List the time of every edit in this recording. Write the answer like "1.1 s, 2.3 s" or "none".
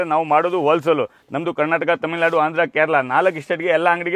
none